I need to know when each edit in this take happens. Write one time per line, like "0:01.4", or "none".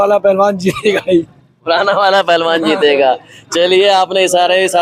none